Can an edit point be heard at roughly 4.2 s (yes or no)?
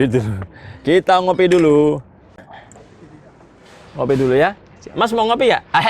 no